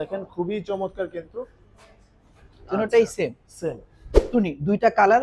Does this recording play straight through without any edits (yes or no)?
no